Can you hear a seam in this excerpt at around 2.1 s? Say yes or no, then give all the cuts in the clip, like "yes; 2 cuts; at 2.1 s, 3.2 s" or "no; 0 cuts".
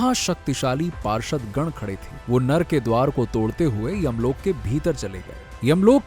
yes; 1 cut; at 2.1 s